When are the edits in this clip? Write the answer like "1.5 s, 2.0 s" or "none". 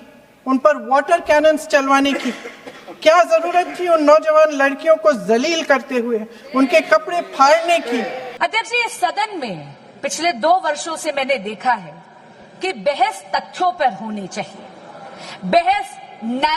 8.2 s